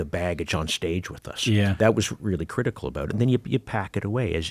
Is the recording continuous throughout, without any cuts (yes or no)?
no